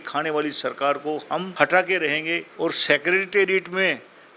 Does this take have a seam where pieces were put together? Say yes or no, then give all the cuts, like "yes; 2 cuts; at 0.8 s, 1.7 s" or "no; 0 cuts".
yes; 2 cuts; at 1.5 s, 2.4 s